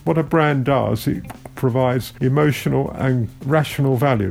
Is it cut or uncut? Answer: cut